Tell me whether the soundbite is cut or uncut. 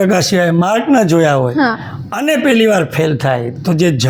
uncut